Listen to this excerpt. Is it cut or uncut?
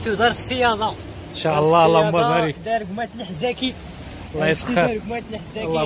uncut